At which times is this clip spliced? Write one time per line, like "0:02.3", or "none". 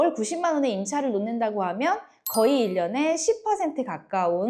none